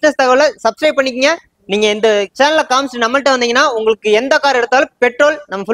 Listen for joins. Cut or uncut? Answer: uncut